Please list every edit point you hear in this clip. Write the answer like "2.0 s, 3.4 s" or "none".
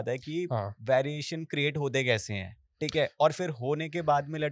none

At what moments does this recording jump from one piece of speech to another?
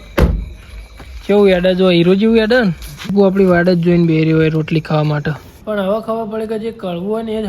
3.1 s, 5.5 s

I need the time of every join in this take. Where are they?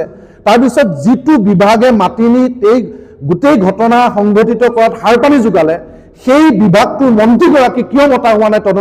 none

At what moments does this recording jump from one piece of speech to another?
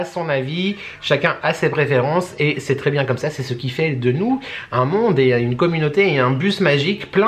none

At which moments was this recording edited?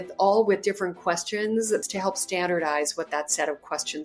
1.8 s

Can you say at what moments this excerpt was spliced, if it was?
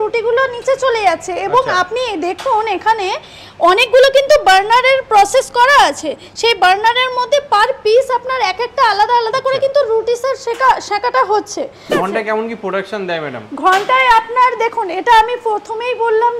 11.9 s

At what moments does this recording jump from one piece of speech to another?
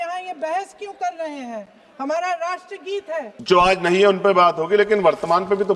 3.3 s

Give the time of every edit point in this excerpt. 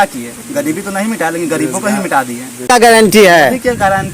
2.7 s

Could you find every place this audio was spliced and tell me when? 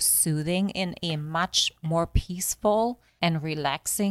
3.1 s

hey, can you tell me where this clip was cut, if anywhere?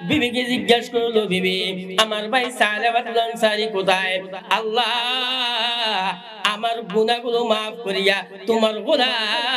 4.3 s

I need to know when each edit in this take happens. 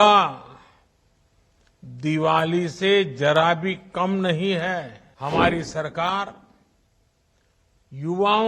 5.0 s

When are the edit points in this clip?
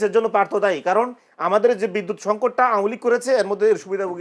none

